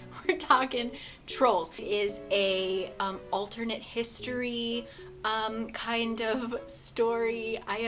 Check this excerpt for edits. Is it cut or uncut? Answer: cut